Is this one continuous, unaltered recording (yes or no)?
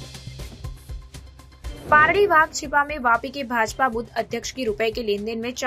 no